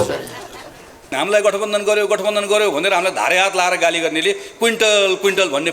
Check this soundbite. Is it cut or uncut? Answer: cut